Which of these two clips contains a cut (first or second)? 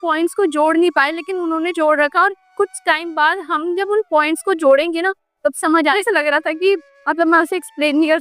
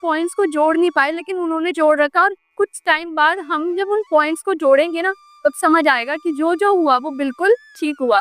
first